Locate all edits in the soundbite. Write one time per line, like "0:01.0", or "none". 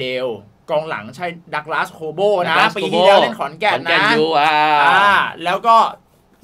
none